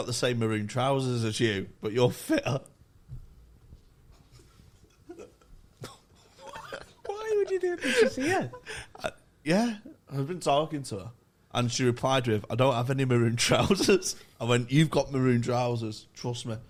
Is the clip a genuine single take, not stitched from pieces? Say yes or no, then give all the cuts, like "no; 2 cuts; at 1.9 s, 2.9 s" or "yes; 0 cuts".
yes; 0 cuts